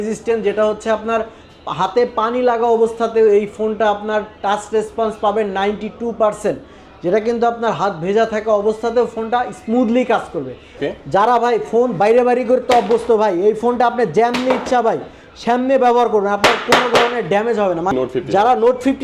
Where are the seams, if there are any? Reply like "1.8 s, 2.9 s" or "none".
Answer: 10.7 s, 17.9 s